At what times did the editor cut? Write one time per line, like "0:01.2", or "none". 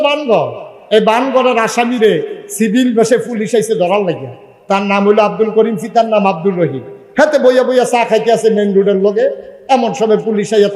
none